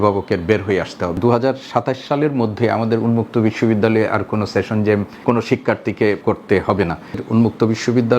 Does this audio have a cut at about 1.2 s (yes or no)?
yes